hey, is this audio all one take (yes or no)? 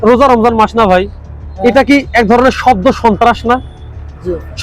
yes